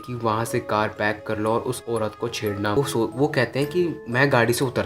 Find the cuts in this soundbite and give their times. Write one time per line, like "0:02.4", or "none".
0:02.8